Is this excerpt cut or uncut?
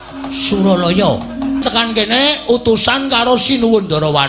cut